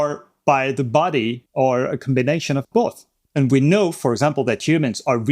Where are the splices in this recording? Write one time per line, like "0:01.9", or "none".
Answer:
0:01.4
0:03.0

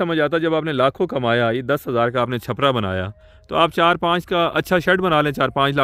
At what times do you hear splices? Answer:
none

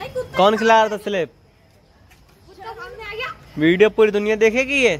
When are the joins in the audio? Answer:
none

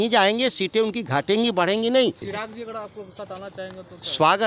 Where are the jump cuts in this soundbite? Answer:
0:02.3

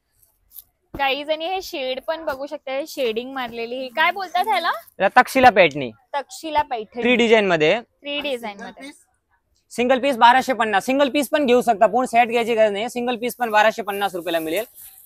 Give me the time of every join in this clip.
none

